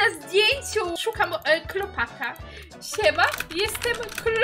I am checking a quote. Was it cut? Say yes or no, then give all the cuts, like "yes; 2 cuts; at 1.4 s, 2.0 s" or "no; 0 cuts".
yes; 1 cut; at 1.0 s